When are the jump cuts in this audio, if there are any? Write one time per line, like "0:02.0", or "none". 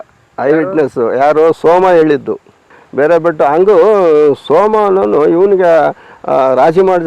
0:02.6